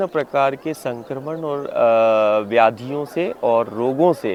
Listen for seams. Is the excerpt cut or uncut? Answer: uncut